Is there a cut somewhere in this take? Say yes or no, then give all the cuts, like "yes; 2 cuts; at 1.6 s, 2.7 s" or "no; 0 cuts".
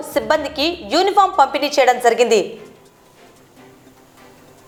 no; 0 cuts